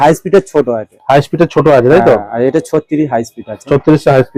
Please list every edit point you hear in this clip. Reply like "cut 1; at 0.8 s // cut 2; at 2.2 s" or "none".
none